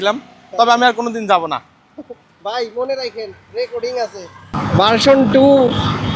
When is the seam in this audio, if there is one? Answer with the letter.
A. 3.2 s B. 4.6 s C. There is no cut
B